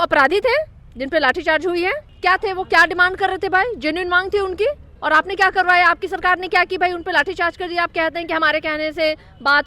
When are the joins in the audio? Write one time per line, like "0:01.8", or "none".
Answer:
0:02.1
0:04.9

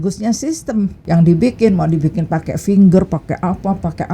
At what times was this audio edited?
0:01.0

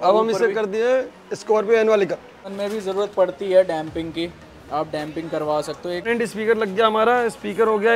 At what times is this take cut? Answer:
0:02.5
0:06.1

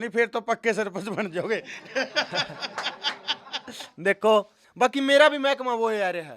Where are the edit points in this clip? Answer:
0:04.6

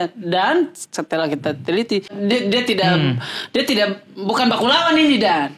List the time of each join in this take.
0:02.2

